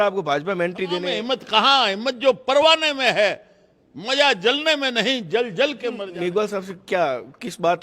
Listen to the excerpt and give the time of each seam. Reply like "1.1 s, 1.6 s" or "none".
1.1 s, 6.0 s